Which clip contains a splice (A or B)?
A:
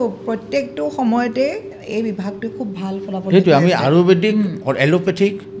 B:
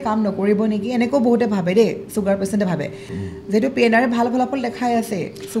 B